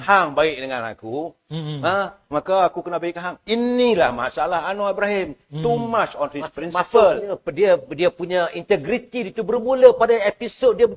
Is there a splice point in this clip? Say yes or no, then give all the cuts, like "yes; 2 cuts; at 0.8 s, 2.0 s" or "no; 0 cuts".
no; 0 cuts